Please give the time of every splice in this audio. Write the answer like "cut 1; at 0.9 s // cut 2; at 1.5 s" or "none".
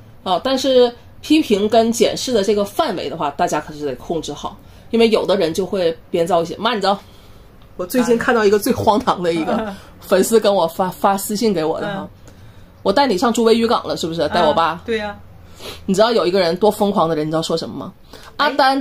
none